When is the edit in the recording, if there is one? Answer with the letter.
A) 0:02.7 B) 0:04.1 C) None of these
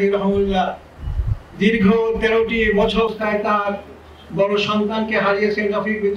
A